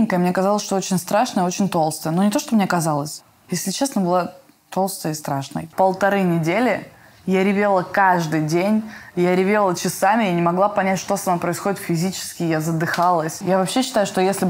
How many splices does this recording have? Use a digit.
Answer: 2